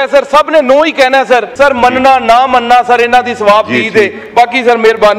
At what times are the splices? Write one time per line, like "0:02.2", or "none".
0:01.5